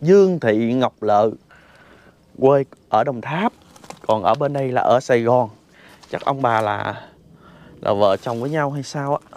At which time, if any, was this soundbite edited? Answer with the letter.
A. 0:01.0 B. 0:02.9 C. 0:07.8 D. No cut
D